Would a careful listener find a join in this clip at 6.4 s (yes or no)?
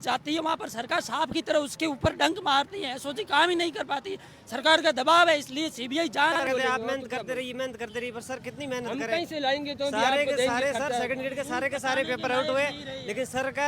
yes